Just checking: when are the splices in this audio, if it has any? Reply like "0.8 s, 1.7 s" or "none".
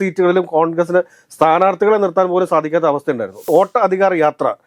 3.4 s